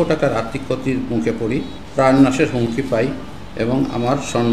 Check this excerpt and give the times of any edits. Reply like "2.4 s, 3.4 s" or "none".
1.8 s